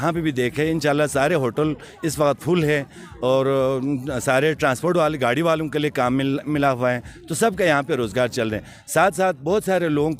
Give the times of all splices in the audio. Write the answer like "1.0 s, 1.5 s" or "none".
none

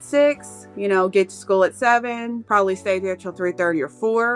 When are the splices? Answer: 2.4 s

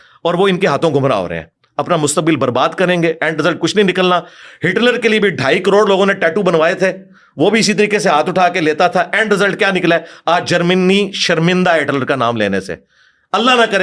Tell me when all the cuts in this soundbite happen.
none

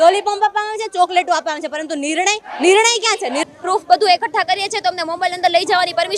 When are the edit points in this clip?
3.4 s

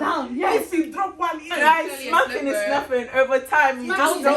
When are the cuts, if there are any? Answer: none

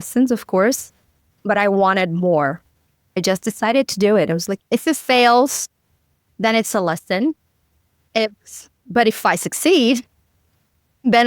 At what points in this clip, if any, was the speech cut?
3.2 s, 4.5 s

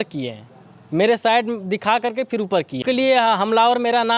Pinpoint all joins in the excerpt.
2.5 s

